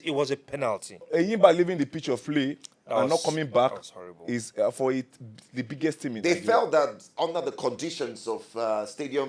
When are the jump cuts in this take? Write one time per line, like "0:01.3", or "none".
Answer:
0:01.1